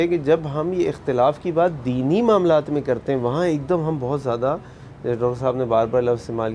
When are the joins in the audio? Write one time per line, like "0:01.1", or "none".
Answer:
none

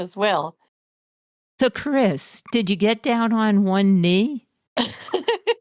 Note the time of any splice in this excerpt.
none

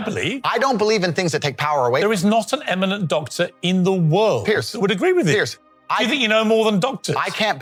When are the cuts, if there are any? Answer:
none

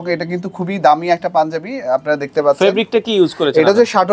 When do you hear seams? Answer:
none

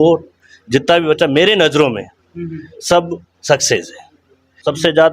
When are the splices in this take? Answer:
none

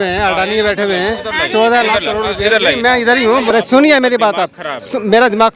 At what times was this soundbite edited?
0:03.5

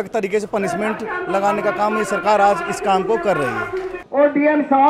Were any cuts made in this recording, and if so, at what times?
0:04.0

